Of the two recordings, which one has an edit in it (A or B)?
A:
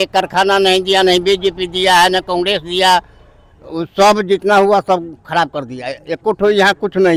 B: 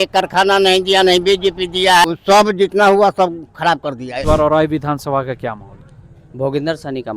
B